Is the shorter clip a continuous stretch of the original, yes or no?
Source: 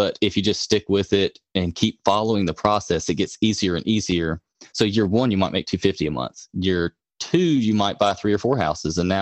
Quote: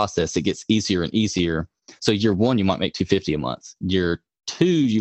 yes